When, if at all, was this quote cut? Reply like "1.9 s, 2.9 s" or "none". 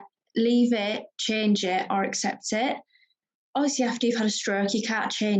none